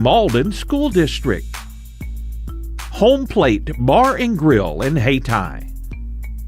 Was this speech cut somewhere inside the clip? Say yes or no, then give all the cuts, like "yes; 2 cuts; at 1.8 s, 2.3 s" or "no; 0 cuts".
yes; 1 cut; at 5.5 s